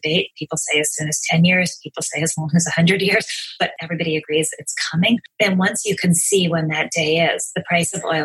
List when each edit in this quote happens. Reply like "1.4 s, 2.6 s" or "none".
3.7 s, 5.3 s